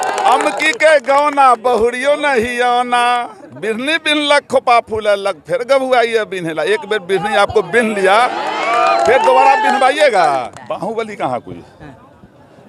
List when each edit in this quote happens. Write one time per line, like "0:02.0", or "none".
0:10.6